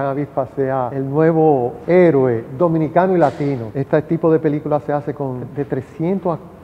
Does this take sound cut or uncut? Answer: cut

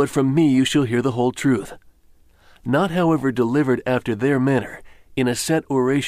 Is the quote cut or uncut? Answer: cut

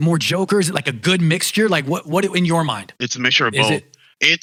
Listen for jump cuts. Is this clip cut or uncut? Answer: uncut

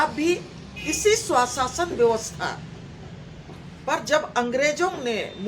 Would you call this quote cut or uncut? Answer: uncut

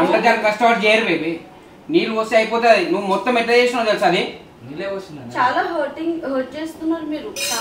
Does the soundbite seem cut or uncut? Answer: uncut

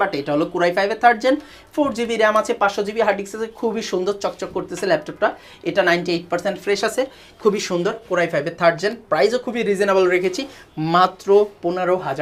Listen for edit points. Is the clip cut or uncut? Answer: uncut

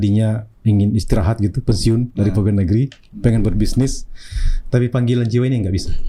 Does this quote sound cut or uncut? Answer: uncut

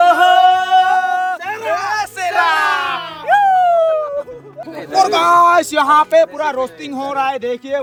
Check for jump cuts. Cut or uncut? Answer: uncut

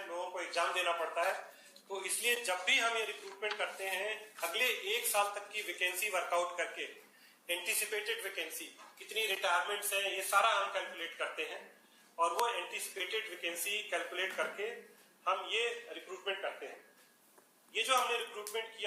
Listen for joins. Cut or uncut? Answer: uncut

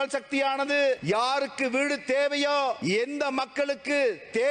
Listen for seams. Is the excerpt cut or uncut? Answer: cut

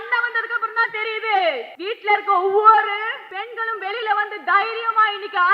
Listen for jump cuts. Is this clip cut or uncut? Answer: cut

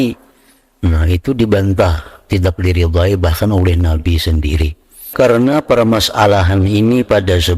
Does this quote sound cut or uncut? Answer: cut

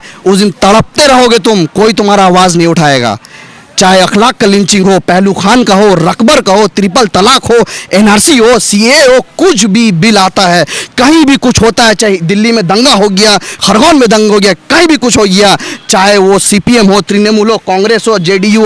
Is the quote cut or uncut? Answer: uncut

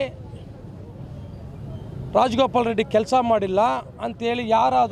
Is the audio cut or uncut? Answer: uncut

